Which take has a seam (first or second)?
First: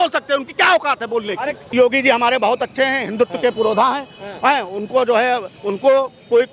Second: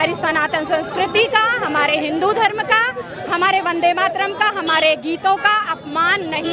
first